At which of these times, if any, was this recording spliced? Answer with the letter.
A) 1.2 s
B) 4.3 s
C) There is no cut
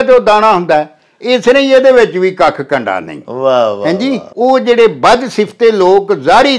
B